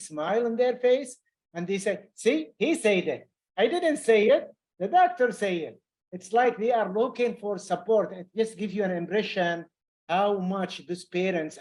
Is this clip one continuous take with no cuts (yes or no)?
yes